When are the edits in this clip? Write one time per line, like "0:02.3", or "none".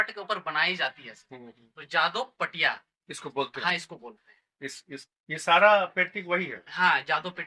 none